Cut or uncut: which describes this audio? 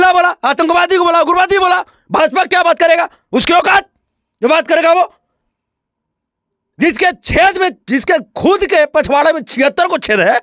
uncut